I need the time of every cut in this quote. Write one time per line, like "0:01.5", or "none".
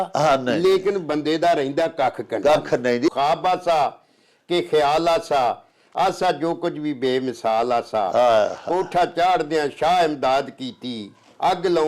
0:03.1